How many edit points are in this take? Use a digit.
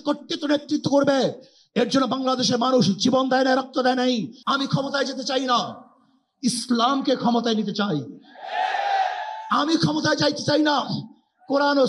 1